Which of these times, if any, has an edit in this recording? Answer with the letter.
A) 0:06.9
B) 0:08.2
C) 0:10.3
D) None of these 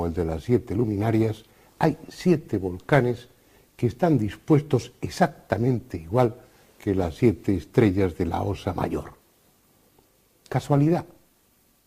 B